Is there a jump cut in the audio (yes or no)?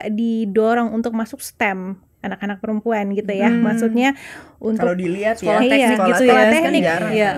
no